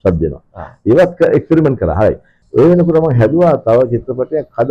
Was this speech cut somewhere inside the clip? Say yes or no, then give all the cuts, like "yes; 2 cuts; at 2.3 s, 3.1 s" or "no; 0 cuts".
yes; 1 cut; at 2.3 s